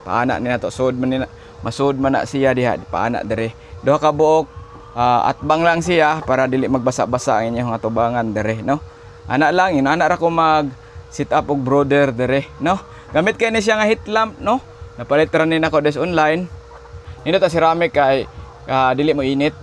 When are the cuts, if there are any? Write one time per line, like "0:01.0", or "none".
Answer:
none